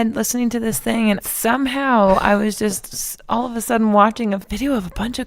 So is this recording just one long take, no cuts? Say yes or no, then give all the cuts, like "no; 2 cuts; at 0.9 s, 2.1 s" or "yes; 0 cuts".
no; 2 cuts; at 1.2 s, 4.4 s